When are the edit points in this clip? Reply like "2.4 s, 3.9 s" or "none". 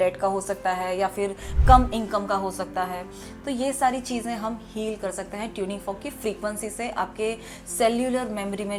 none